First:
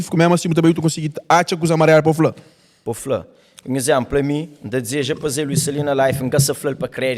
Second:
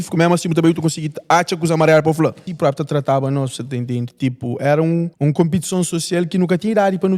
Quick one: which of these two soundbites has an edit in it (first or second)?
second